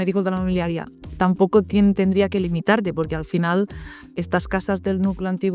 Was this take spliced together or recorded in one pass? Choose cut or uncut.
uncut